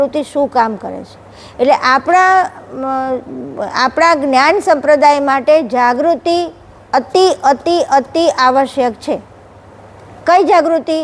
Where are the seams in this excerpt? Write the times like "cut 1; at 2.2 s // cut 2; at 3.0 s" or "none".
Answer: none